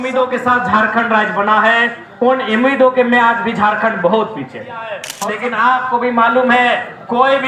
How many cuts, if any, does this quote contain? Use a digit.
1